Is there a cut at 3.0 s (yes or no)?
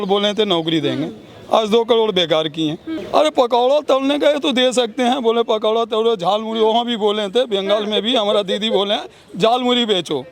yes